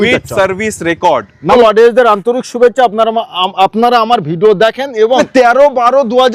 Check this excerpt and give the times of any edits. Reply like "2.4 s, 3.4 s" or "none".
1.5 s, 5.2 s